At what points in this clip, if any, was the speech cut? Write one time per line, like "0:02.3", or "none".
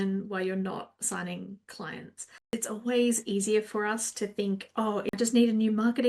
0:02.6
0:05.1